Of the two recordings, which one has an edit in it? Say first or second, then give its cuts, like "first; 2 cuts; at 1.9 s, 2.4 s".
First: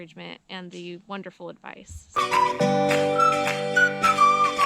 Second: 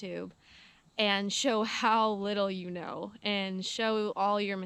first; 1 cut; at 2.2 s